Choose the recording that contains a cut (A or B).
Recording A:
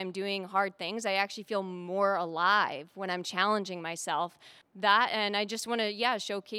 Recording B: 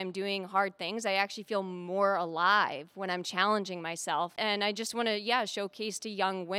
B